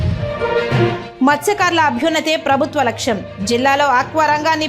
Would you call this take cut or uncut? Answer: uncut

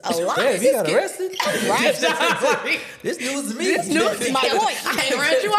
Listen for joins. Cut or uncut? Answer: uncut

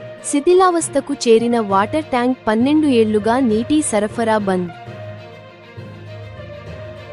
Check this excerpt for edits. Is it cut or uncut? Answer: uncut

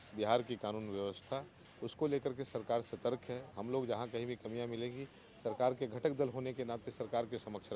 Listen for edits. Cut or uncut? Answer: uncut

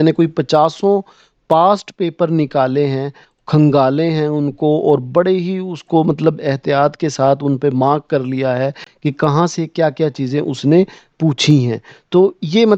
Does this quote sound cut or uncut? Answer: uncut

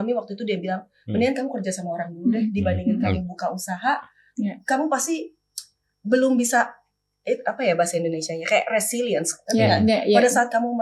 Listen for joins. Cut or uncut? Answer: uncut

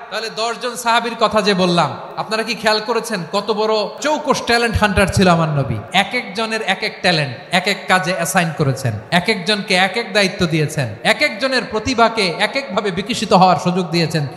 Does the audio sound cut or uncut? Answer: cut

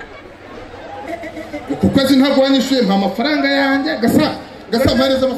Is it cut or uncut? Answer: cut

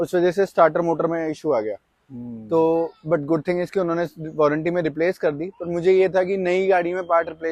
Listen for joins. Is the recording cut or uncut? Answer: uncut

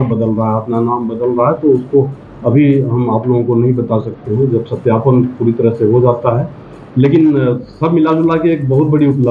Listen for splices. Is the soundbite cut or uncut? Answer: uncut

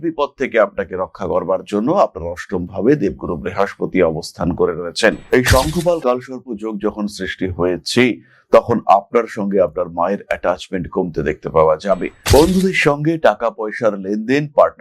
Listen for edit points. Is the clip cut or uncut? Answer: cut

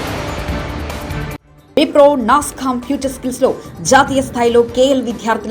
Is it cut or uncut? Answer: cut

